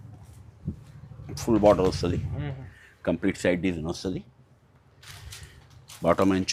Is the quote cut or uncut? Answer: uncut